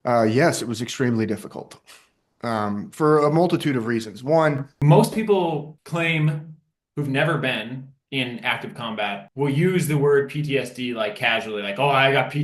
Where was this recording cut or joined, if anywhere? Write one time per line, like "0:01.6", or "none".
0:04.7
0:05.8
0:09.3